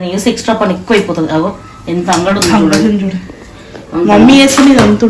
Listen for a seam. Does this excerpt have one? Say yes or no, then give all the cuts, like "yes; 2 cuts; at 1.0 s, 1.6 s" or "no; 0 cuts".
no; 0 cuts